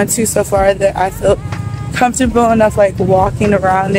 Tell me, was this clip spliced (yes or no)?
no